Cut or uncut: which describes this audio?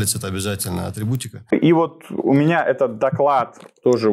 cut